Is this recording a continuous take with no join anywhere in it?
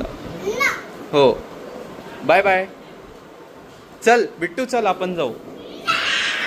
yes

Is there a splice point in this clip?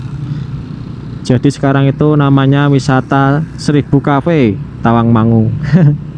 no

